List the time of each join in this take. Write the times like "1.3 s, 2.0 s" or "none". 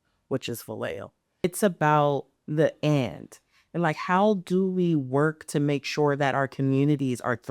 1.4 s